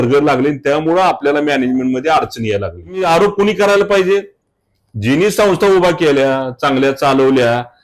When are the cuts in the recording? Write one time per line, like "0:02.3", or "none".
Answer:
0:03.0